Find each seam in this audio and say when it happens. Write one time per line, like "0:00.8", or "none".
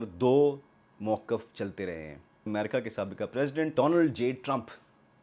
0:02.4
0:03.7